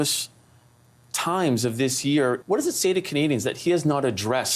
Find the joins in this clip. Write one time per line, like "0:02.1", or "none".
0:02.4